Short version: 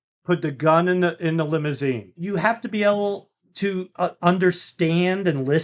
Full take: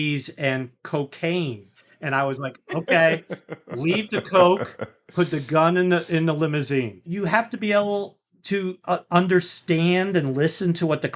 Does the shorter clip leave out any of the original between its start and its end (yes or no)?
no